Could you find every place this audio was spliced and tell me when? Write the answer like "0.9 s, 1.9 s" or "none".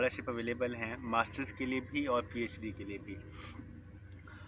none